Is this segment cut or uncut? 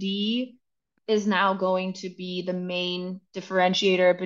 uncut